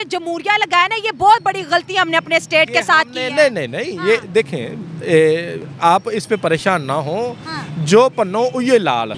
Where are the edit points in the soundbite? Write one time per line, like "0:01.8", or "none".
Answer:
none